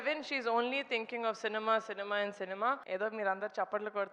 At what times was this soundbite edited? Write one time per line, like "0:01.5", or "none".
0:02.8